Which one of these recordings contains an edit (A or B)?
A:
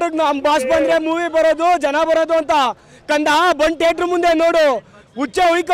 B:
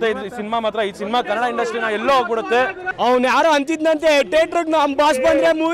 B